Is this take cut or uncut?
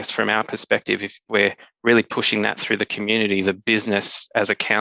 cut